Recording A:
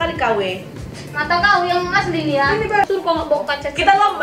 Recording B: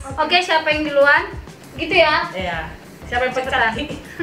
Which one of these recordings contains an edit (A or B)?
A